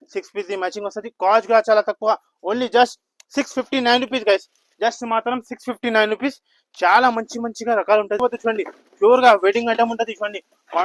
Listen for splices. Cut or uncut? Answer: cut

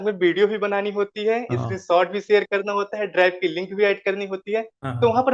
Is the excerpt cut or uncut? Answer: uncut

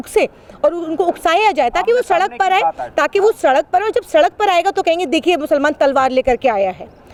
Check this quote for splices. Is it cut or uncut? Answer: uncut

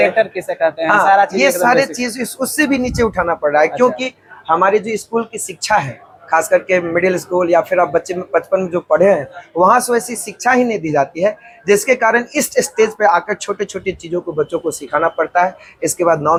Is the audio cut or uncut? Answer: uncut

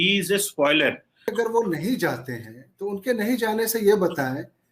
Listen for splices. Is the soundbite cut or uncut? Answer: cut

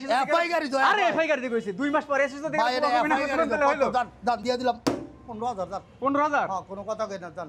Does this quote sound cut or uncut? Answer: uncut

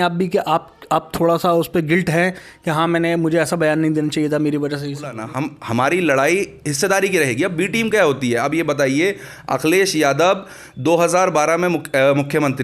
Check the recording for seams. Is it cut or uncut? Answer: cut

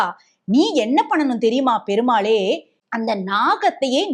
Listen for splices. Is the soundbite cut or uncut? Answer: cut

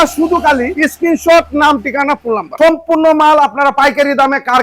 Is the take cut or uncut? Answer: cut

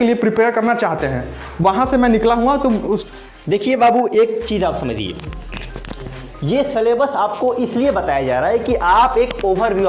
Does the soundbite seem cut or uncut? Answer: cut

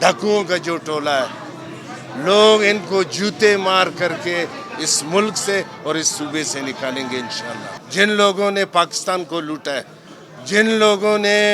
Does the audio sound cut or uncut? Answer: cut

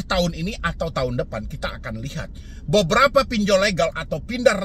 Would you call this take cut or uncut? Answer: uncut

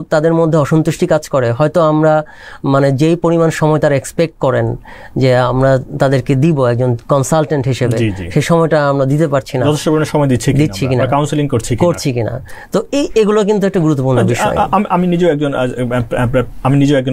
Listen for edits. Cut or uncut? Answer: uncut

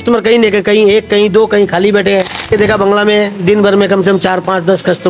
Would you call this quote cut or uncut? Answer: cut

